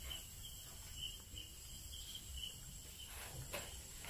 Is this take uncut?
no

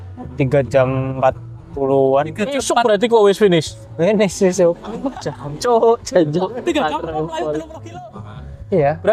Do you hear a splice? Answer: no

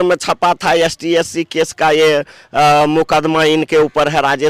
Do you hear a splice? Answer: no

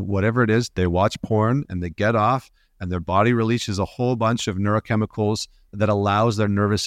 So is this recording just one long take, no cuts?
no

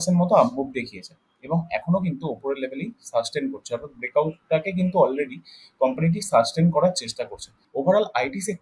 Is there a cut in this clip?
yes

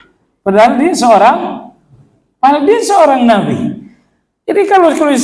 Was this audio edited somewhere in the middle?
no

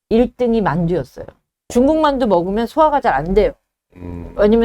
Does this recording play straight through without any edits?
no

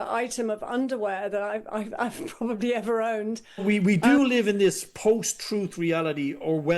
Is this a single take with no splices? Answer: no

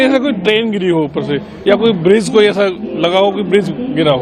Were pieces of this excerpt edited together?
no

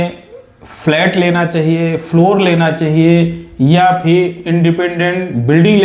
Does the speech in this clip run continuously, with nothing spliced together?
yes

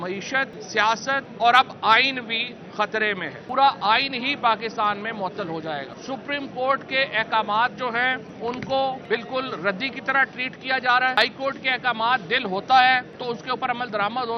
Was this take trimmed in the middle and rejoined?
yes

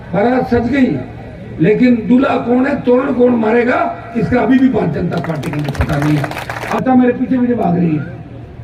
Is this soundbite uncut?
no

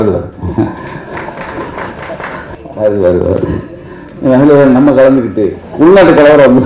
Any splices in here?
yes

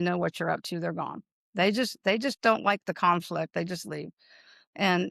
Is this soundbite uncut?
yes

